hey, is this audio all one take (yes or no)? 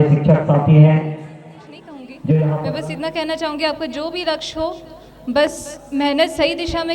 no